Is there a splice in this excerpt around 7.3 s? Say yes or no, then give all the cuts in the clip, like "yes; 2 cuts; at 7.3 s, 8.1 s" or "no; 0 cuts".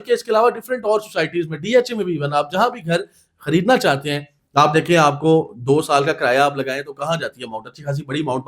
no; 1 cut; at 4.3 s